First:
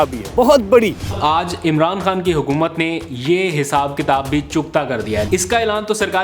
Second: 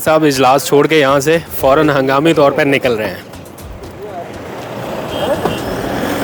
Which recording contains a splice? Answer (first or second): first